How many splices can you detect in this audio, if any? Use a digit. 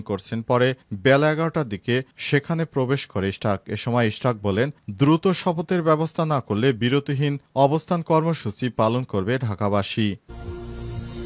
1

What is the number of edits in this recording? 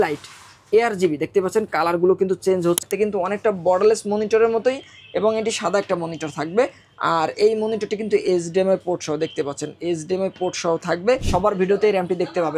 2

